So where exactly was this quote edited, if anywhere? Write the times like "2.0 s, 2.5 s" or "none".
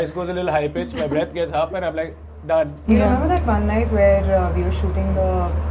2.8 s